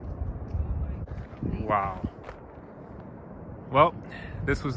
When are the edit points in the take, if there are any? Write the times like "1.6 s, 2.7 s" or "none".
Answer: 1.1 s